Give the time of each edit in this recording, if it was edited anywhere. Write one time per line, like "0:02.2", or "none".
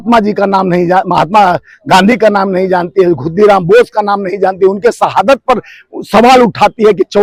none